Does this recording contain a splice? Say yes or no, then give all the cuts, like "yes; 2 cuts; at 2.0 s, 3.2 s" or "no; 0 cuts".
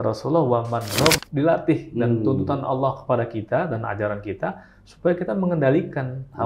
yes; 1 cut; at 1.2 s